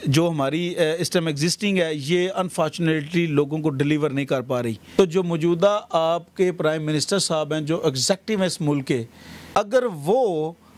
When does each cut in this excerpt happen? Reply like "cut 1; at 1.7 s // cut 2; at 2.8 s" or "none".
cut 1; at 4.8 s // cut 2; at 9.6 s